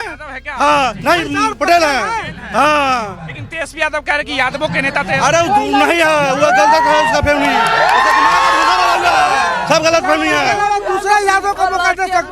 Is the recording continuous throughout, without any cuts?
no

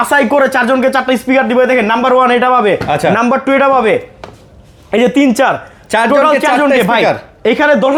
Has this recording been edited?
no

